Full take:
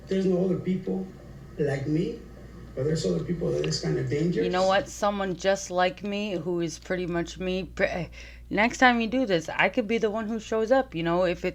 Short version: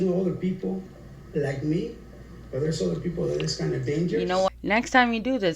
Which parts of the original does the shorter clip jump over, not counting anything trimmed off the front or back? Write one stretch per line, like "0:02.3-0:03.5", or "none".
0:04.7-0:08.4